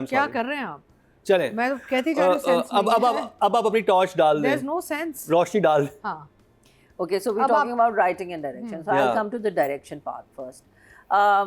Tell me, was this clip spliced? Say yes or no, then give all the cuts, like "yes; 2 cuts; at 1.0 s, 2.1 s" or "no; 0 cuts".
no; 0 cuts